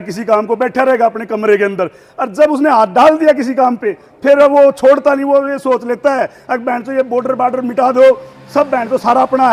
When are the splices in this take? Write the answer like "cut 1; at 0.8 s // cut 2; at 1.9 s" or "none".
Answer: none